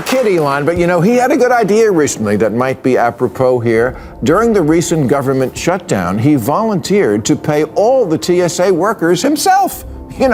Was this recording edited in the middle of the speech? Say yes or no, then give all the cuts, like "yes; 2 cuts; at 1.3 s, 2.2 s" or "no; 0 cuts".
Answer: no; 0 cuts